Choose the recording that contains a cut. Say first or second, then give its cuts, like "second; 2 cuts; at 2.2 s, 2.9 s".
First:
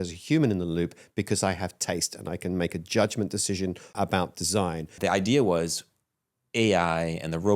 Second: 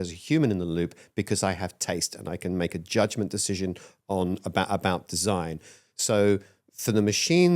first; 2 cuts; at 3.9 s, 4.9 s